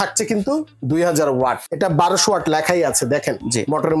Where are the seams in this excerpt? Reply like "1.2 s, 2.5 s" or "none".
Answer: 1.6 s

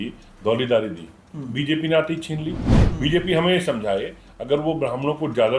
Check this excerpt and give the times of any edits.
2.8 s

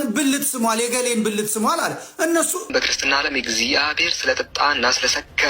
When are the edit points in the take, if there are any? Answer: 2.7 s

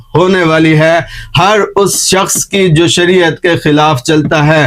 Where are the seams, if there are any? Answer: none

